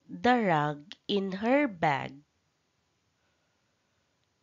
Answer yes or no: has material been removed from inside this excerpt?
no